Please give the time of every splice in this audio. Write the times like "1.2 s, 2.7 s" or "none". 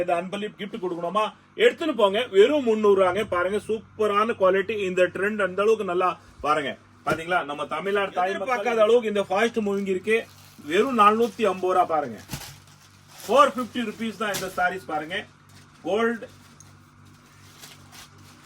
8.4 s